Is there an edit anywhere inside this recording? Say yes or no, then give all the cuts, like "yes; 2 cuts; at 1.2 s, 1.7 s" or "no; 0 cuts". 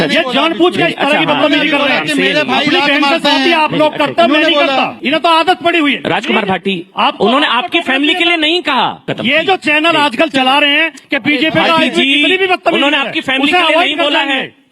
yes; 2 cuts; at 4.9 s, 9.1 s